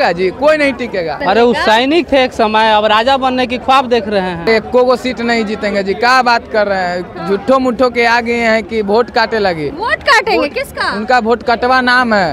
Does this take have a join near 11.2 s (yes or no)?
no